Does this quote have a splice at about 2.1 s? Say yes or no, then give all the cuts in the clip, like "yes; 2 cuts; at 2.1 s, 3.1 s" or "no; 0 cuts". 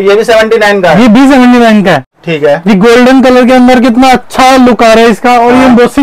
yes; 1 cut; at 2.1 s